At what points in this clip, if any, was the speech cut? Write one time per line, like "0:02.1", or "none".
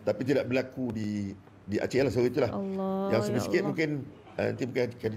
none